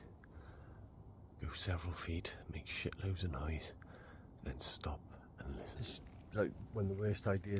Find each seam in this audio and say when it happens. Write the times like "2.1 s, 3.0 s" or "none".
6.2 s